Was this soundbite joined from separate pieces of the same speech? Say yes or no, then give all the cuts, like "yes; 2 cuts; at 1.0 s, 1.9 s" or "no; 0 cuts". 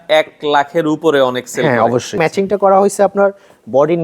yes; 1 cut; at 2.2 s